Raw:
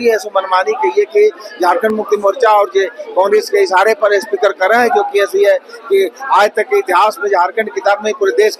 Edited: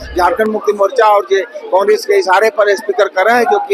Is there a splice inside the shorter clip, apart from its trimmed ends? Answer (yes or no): no